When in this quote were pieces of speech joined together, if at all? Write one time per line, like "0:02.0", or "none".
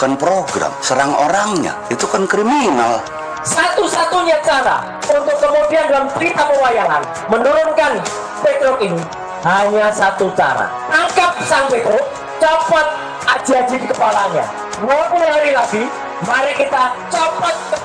0:00.8
0:01.8
0:03.1